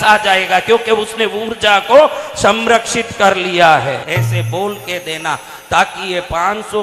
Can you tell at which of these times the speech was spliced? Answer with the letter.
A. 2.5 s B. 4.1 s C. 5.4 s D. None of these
B